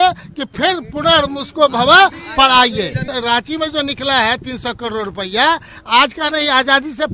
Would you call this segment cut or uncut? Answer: cut